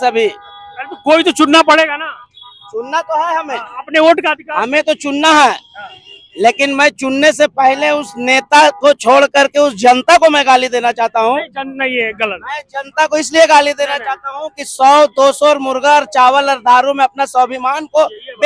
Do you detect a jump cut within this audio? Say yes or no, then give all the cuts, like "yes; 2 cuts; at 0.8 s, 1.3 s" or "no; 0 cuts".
no; 0 cuts